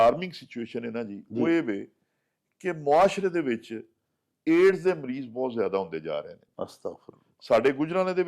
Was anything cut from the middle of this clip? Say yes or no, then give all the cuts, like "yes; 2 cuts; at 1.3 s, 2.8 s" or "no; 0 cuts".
no; 0 cuts